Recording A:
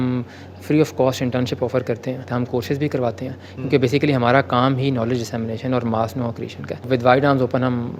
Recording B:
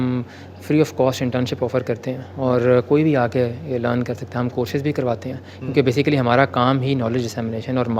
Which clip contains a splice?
A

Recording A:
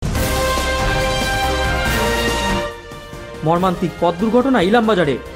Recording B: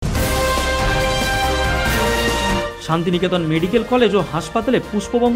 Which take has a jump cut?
B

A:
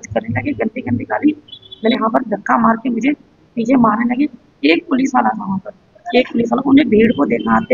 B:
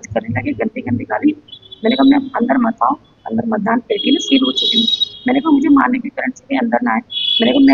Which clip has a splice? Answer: A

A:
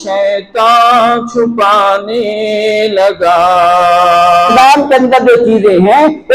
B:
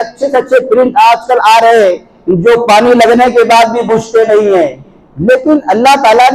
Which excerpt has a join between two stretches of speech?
A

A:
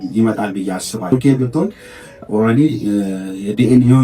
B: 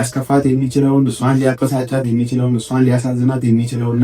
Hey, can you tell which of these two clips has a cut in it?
A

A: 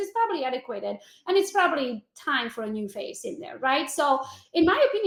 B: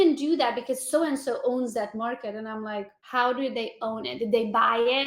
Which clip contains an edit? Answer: B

